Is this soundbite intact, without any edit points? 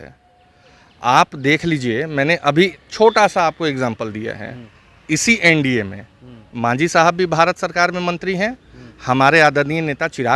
yes; 0 cuts

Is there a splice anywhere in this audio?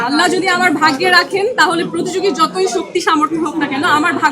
no; 0 cuts

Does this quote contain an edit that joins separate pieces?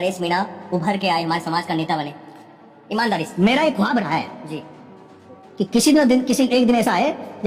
no; 0 cuts

